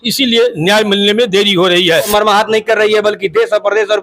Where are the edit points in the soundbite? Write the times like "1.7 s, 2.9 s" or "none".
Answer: 2.1 s